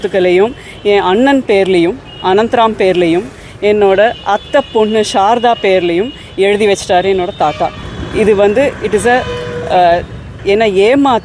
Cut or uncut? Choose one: uncut